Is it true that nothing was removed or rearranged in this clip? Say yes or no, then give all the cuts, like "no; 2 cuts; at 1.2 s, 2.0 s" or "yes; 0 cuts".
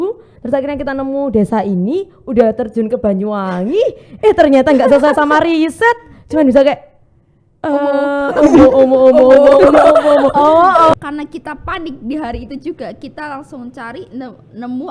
no; 1 cut; at 10.9 s